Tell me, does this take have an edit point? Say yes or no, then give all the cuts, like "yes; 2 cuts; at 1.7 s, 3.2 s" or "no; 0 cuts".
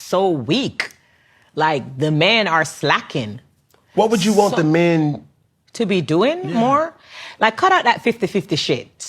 yes; 1 cut; at 1.0 s